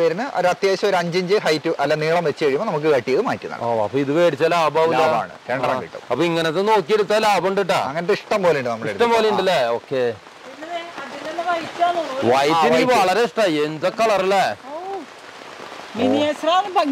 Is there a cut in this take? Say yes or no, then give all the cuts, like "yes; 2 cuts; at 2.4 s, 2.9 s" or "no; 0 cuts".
no; 0 cuts